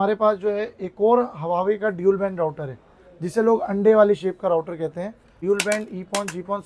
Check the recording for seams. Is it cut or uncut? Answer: cut